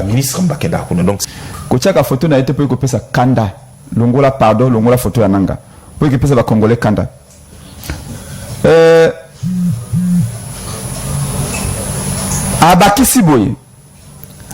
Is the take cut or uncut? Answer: cut